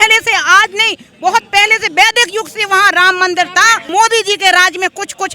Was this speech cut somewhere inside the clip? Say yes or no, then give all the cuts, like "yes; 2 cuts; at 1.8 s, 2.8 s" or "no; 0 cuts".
yes; 1 cut; at 3.9 s